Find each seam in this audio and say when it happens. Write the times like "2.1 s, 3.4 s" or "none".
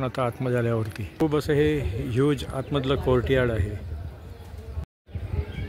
1.0 s, 4.8 s

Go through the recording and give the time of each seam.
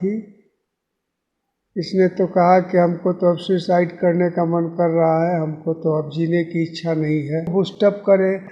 7.5 s

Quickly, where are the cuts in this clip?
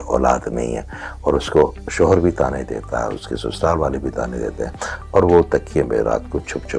none

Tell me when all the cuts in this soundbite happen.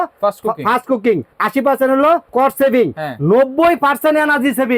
1.3 s, 2.3 s

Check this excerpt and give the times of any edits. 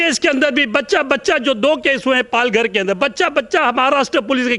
none

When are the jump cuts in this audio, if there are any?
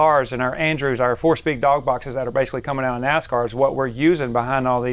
none

